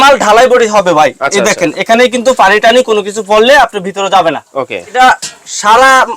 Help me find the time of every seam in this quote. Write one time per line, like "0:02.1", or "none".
0:04.9